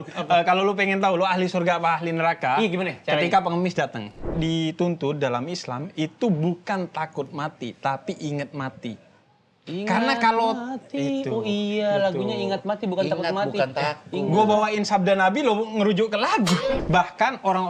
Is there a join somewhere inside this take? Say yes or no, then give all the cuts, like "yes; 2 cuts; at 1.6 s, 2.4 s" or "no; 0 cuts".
yes; 2 cuts; at 4.2 s, 16.8 s